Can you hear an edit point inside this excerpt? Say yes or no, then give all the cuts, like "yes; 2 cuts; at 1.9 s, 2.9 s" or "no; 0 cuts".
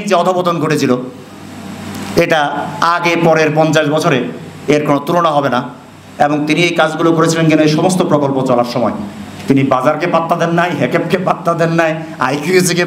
no; 0 cuts